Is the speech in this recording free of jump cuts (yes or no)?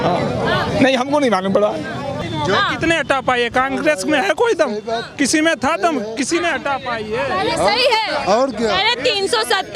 no